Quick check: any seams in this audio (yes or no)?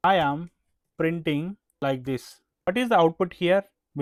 no